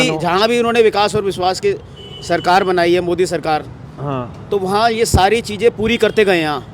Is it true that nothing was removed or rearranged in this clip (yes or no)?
yes